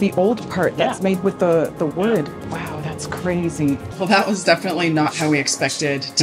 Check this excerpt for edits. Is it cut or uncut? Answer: cut